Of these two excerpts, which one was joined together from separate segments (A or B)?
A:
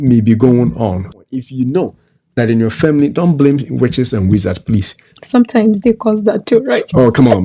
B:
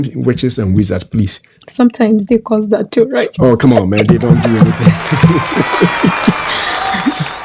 A